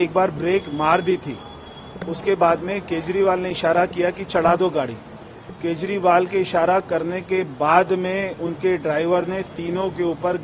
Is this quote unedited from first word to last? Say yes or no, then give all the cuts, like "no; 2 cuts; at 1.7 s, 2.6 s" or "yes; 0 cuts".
yes; 0 cuts